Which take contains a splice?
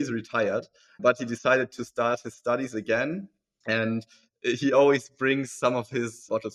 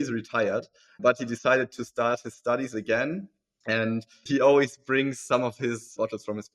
second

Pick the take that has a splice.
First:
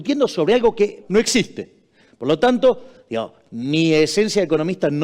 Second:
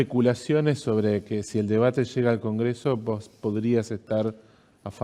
first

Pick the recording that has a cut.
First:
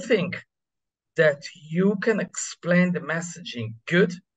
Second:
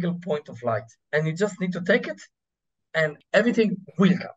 second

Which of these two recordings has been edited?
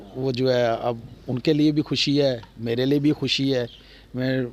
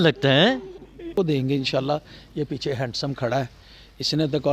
second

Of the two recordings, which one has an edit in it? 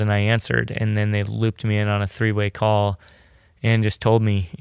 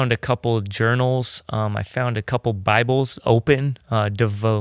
second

